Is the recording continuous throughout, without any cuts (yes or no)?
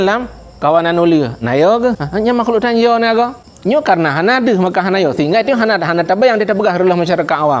no